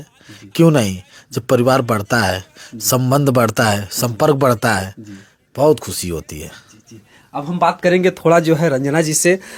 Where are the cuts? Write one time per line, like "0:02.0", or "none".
none

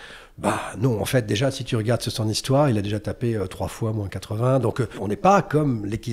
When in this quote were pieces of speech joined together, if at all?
0:05.0

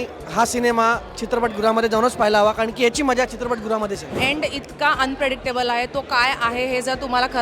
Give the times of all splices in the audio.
0:04.2

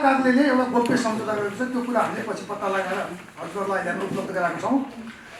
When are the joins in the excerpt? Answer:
none

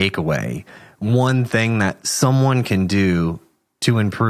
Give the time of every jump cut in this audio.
0:02.0

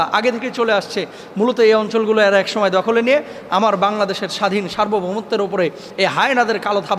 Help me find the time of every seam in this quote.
none

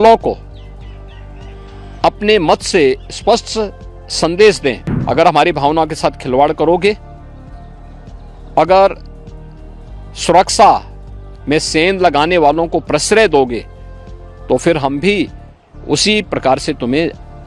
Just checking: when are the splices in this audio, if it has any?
0:04.9

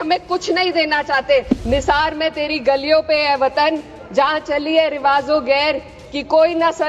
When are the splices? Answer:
0:01.6

